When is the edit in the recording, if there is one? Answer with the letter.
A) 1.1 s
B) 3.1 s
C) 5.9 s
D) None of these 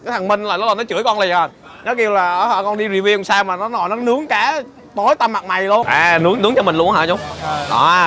C